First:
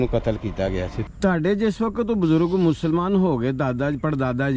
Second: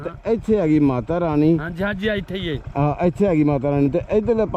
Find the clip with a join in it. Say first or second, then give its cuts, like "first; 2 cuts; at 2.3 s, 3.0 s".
first; 1 cut; at 1.0 s